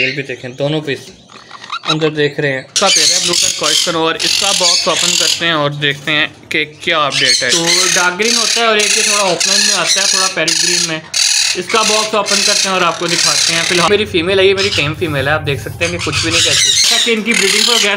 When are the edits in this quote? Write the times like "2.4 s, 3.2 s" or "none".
2.7 s, 7.5 s, 13.9 s, 16.8 s